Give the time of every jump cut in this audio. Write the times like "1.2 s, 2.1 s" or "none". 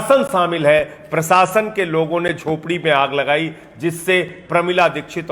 none